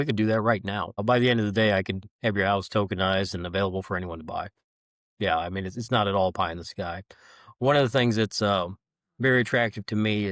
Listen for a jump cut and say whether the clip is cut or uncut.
cut